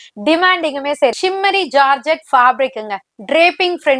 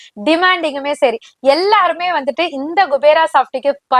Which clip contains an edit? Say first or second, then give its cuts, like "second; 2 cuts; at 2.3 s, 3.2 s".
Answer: first; 1 cut; at 1.2 s